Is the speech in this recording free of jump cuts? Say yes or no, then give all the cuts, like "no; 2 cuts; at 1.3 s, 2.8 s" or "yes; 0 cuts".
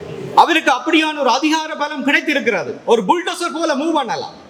yes; 0 cuts